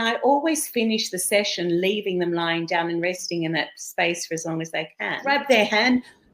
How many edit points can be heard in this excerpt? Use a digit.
1